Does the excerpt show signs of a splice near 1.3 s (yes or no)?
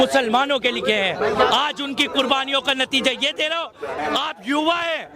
no